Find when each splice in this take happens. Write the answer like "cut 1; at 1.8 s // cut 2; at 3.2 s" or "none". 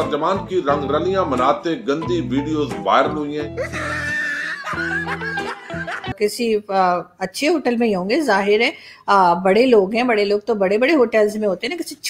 cut 1; at 6.1 s